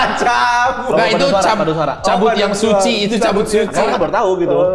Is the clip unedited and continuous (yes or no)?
no